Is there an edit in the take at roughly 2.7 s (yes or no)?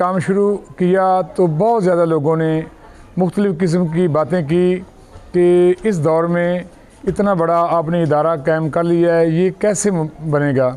no